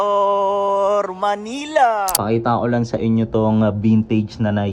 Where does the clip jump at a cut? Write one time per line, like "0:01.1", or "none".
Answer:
0:02.1